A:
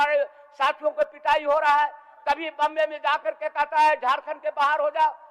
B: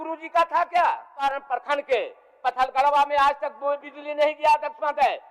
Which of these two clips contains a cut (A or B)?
B